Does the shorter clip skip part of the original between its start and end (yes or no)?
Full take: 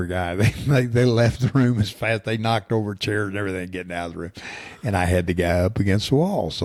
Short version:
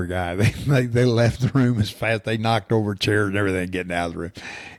no